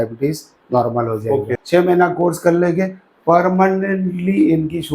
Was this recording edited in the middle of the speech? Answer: yes; 1 cut; at 1.6 s

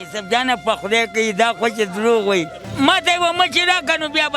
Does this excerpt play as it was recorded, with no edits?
no; 1 cut; at 2.6 s

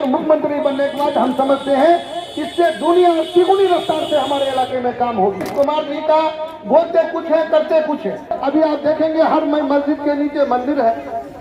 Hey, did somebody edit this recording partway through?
yes; 2 cuts; at 5.4 s, 8.3 s

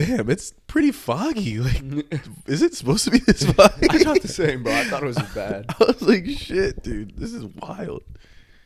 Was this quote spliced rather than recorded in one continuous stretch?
no; 0 cuts

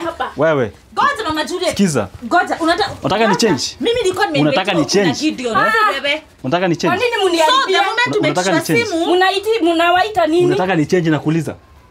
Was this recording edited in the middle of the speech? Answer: no; 0 cuts

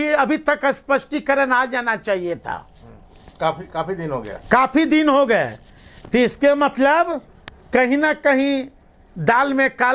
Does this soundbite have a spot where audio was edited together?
no; 0 cuts

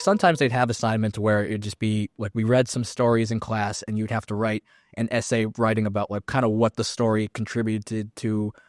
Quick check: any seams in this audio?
no; 0 cuts

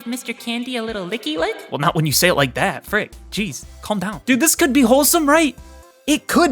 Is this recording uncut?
no; 1 cut; at 4.2 s

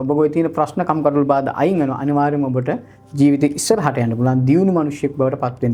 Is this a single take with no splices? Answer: yes; 0 cuts

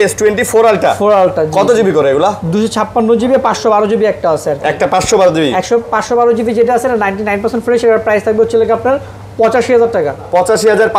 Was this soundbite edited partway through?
no; 0 cuts

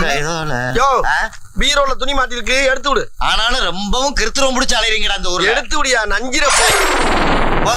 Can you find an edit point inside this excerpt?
no; 0 cuts

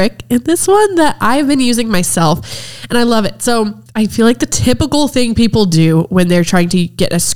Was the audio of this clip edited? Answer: yes; 1 cut; at 3.8 s

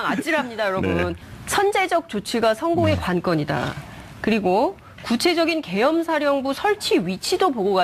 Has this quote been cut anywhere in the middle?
yes; 1 cut; at 1.2 s

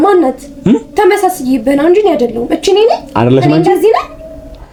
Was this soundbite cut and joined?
no; 0 cuts

